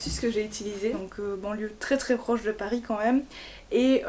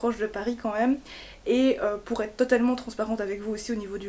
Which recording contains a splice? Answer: first; 1 cut; at 1.1 s

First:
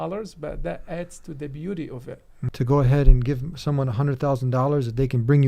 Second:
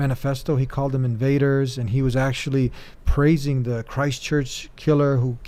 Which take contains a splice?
first; 1 cut; at 2.4 s

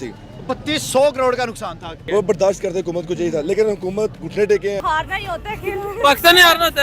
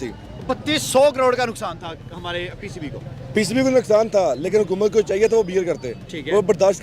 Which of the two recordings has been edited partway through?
first; 2 cuts; at 1.9 s, 4.8 s

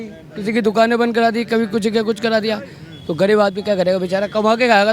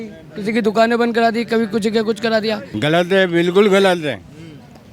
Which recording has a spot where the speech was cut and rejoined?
second; 1 cut; at 2.7 s

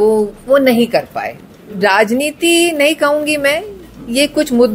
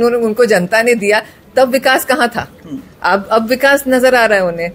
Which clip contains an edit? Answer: first; 1 cut; at 1.5 s

